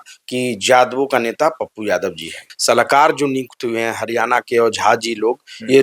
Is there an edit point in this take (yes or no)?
yes